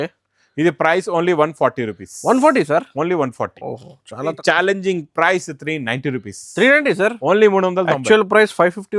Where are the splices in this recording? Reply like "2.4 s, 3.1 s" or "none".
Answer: 4.4 s